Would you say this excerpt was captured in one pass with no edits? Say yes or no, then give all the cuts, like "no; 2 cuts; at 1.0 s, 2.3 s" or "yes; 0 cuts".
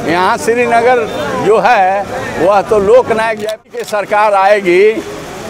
no; 1 cut; at 3.6 s